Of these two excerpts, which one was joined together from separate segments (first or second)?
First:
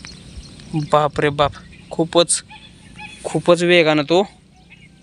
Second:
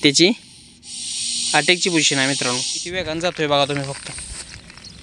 second